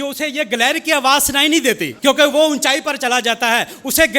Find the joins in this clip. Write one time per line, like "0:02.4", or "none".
0:01.9